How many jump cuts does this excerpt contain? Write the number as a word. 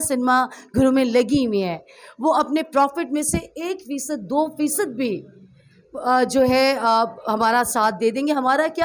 zero